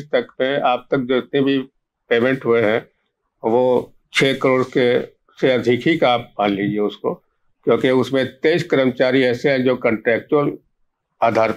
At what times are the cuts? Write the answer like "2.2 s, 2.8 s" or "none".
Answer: none